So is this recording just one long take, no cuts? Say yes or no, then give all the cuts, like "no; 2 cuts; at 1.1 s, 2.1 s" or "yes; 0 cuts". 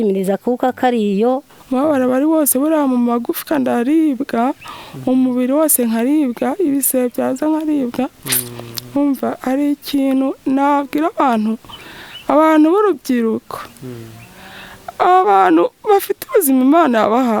no; 1 cut; at 1.5 s